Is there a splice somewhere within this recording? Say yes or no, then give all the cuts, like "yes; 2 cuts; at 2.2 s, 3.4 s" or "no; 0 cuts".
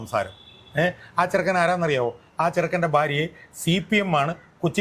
no; 0 cuts